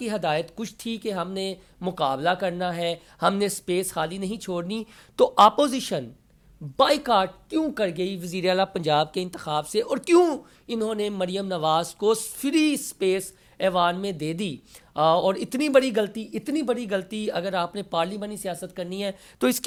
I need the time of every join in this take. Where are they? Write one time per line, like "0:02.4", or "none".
none